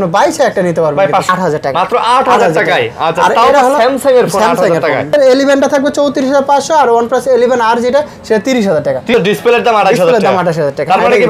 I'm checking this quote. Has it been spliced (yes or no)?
yes